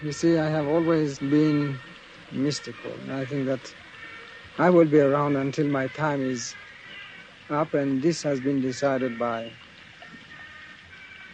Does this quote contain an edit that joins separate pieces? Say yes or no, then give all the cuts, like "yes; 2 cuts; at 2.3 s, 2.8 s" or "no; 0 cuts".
yes; 1 cut; at 1.2 s